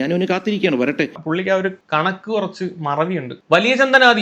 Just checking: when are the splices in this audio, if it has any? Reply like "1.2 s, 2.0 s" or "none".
1.2 s